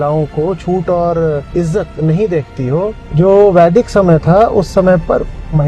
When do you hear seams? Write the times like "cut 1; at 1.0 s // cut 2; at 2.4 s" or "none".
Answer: cut 1; at 1.4 s // cut 2; at 3.0 s